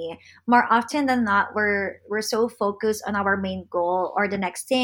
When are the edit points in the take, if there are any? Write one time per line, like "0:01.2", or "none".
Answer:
none